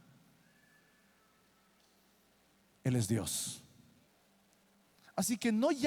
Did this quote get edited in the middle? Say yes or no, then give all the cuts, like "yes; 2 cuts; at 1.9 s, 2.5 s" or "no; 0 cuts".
yes; 1 cut; at 4.1 s